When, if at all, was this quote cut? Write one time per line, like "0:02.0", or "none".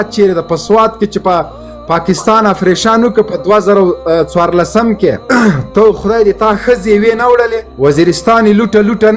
none